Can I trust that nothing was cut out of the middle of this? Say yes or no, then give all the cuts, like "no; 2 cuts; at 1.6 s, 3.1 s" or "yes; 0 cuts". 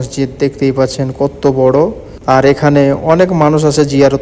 no; 1 cut; at 2.1 s